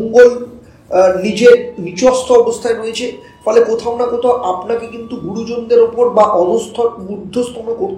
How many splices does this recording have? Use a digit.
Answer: 0